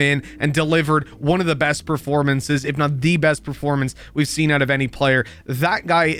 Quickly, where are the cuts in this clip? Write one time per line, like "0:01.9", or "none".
none